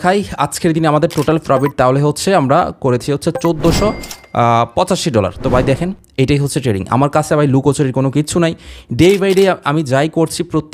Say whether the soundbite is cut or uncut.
uncut